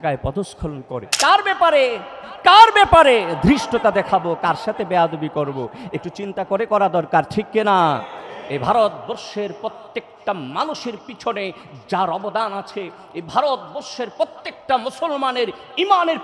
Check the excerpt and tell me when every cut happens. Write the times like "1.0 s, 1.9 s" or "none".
1.1 s